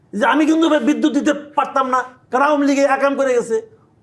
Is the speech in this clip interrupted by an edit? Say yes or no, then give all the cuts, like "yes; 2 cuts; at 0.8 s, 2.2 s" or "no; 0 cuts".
yes; 1 cut; at 2.2 s